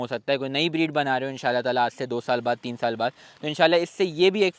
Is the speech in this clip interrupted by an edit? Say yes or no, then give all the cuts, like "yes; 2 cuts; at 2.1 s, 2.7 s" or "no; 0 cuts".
no; 0 cuts